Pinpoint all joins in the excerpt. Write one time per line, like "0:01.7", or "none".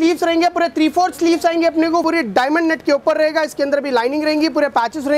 0:02.0

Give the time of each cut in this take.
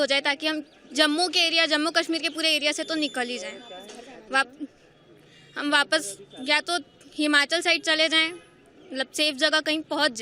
none

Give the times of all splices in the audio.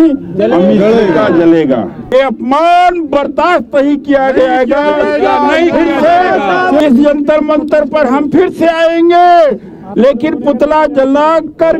0:02.1
0:06.8

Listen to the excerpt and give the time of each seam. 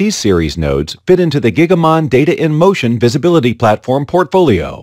0:00.9

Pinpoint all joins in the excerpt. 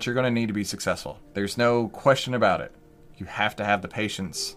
0:01.2

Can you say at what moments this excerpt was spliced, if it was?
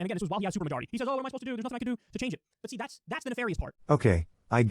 0:03.7

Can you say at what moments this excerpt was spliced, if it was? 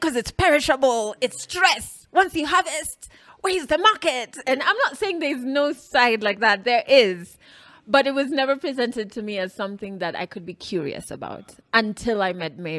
none

